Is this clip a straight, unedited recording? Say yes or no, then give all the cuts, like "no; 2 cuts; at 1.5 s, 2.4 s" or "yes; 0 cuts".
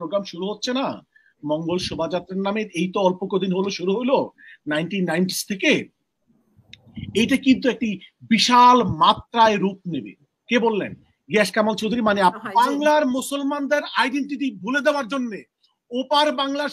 no; 1 cut; at 12.4 s